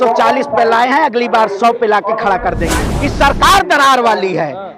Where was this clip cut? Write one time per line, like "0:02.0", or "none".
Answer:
0:02.8